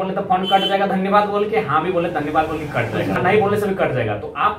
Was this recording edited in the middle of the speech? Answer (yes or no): yes